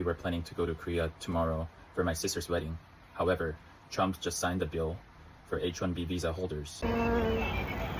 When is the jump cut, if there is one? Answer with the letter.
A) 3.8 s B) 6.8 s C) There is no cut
B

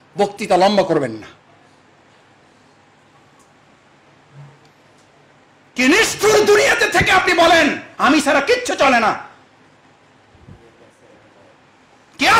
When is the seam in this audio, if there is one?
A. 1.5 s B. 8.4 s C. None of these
C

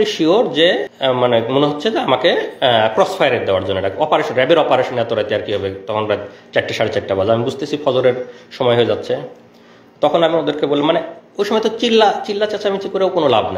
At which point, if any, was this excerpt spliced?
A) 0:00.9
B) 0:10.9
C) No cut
A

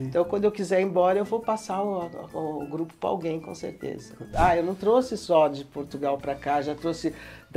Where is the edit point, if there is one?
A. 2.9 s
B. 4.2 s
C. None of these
B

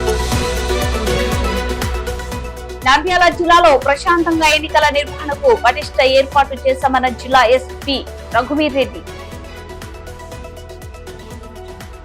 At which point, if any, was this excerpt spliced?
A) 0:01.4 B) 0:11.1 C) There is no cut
C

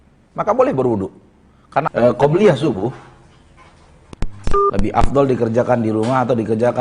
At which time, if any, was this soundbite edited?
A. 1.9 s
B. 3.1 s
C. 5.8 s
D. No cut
A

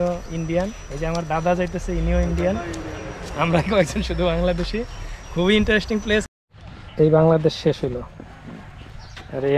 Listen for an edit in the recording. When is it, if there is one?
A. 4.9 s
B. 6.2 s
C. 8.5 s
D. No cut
B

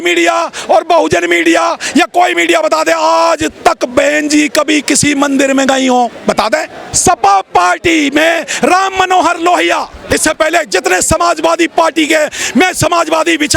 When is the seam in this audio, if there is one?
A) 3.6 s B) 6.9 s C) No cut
B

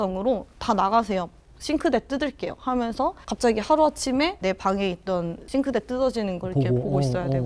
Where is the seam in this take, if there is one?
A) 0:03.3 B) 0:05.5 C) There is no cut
A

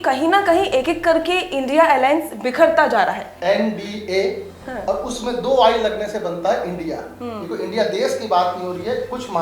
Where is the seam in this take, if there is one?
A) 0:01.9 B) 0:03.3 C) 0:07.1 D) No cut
B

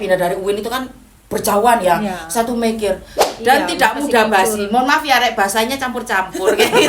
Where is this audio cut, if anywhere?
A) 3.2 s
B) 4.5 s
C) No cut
A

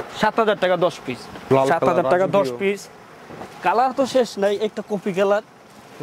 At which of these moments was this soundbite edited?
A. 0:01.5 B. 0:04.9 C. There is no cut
A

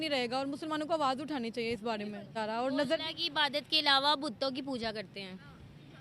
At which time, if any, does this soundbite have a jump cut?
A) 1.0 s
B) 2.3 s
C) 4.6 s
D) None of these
B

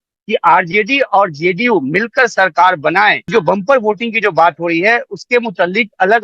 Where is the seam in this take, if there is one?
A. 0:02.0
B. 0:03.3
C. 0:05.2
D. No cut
B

